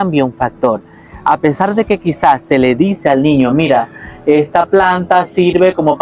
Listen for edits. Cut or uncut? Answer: uncut